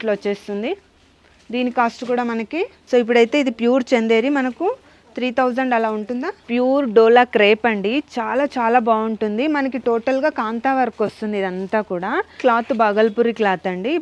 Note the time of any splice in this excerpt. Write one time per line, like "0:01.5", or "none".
0:02.8
0:06.4
0:12.4